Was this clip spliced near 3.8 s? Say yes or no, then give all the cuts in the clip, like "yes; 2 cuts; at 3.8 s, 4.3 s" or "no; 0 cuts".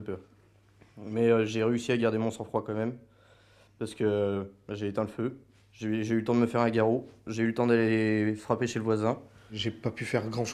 no; 1 cut; at 1.8 s